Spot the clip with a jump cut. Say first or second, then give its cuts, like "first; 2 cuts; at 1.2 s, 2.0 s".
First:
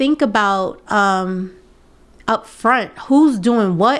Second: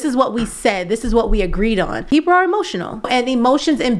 second; 2 cuts; at 2.0 s, 3.1 s